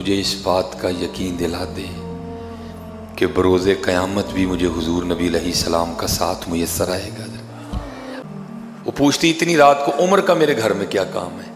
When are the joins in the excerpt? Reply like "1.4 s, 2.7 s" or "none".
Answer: 8.2 s